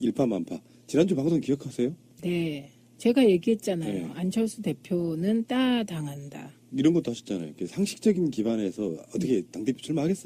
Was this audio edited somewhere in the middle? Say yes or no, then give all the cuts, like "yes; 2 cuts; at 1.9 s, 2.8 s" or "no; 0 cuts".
no; 0 cuts